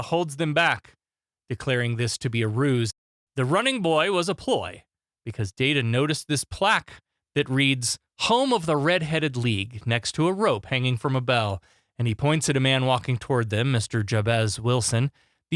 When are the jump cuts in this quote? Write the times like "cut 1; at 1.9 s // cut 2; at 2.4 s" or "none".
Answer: cut 1; at 2.9 s